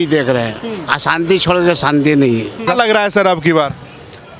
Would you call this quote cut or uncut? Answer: cut